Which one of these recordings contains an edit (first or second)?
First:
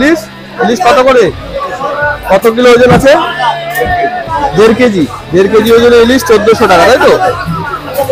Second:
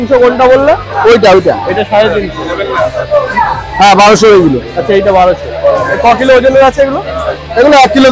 second